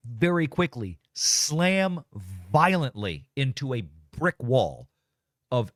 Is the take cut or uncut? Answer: uncut